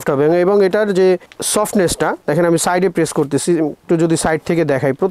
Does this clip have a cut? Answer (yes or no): no